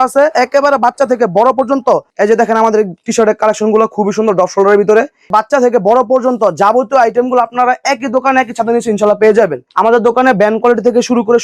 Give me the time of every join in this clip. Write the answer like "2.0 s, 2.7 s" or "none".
2.1 s, 5.3 s, 9.6 s